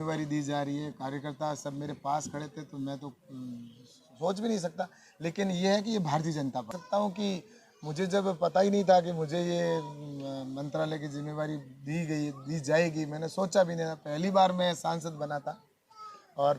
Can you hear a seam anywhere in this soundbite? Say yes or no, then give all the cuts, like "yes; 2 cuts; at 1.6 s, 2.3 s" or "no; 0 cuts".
yes; 1 cut; at 6.7 s